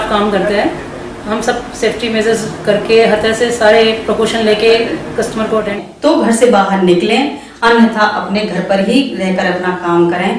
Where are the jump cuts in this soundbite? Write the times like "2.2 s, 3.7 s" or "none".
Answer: 5.8 s